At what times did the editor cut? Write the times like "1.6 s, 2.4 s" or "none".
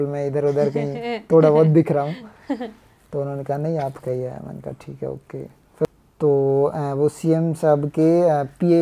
5.9 s